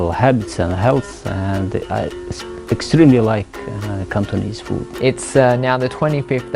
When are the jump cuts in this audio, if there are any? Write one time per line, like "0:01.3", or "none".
0:04.9

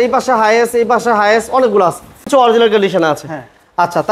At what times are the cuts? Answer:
0:02.3

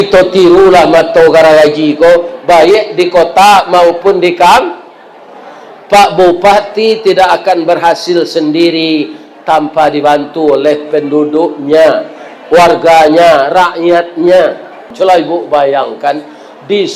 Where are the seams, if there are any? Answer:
0:14.9

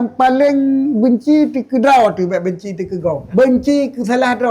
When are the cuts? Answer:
0:03.2

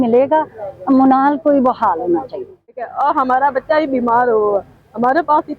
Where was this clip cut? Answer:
0:02.9

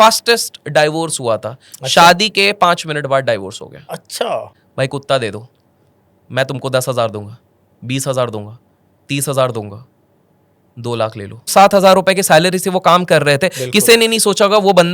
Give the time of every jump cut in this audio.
0:04.6
0:11.5

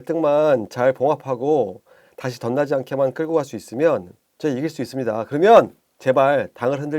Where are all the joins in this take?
0:04.2
0:05.8

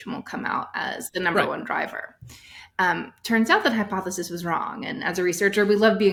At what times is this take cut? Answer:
none

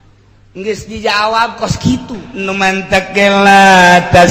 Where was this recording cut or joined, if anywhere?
0:02.3

